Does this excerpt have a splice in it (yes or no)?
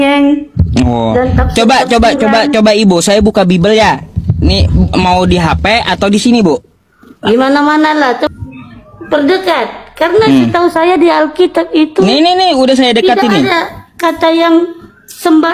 yes